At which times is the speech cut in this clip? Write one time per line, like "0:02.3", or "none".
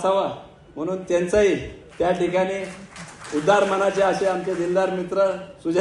none